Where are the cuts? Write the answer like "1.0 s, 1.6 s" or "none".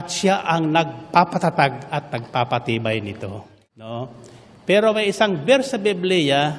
3.5 s

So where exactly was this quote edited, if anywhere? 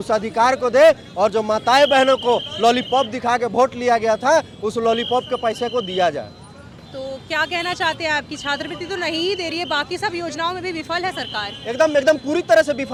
none

